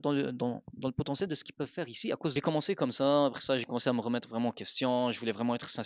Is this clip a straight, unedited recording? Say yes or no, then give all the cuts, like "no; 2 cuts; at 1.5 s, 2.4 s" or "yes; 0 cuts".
no; 1 cut; at 2.3 s